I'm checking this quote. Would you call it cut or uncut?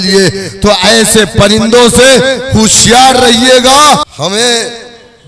cut